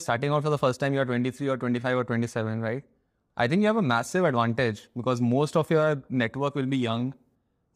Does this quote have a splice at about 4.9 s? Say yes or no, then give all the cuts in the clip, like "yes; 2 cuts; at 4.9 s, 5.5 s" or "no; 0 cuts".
no; 1 cut; at 3.2 s